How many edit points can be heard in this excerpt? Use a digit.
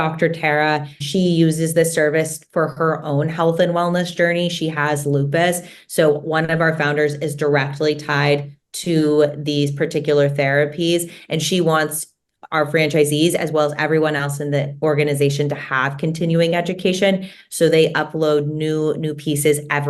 1